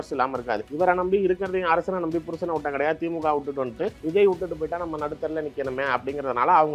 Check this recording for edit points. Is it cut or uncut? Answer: uncut